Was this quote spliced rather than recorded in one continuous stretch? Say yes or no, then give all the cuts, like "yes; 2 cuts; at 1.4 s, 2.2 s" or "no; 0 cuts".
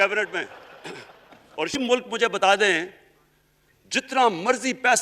yes; 1 cut; at 1.8 s